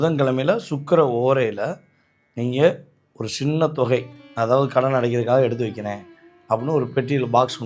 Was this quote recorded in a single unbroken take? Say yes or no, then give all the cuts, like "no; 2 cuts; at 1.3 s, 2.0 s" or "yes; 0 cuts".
yes; 0 cuts